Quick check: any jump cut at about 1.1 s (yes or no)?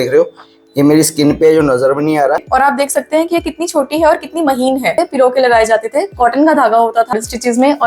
no